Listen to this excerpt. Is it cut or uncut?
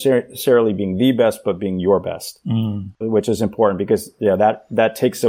cut